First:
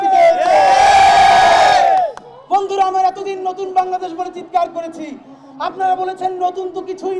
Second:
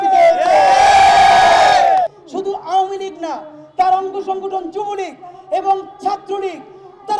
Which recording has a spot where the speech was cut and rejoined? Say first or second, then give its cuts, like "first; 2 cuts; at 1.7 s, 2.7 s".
second; 1 cut; at 2.3 s